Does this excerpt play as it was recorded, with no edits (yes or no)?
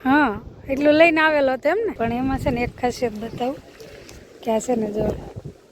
no